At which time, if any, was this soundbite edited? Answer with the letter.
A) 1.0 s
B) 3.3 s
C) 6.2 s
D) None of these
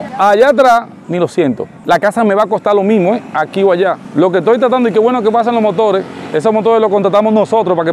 A